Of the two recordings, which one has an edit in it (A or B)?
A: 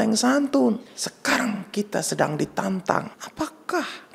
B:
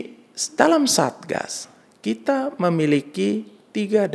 A